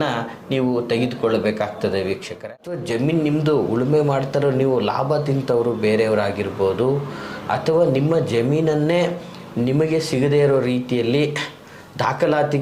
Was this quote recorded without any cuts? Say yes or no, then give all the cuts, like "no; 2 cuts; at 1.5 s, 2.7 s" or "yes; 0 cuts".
no; 1 cut; at 2.3 s